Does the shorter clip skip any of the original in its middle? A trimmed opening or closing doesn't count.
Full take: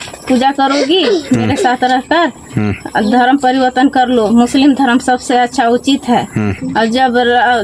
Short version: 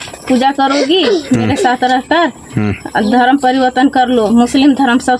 no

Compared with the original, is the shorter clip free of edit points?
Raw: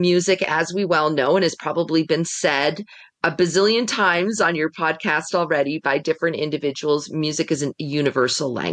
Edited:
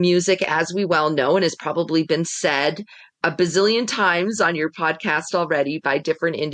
yes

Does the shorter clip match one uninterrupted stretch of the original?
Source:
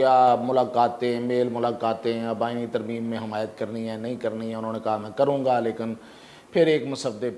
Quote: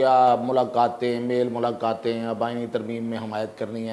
yes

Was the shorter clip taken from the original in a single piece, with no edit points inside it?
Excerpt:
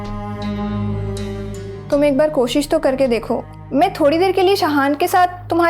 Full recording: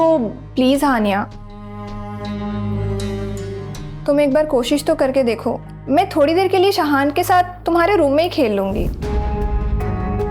no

